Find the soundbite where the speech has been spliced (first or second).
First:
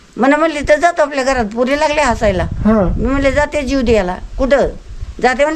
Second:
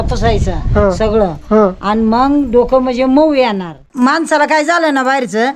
second